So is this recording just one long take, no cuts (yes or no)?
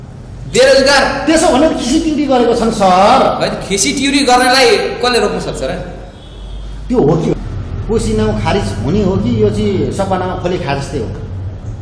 no